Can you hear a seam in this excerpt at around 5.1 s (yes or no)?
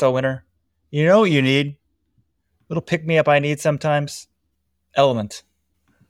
no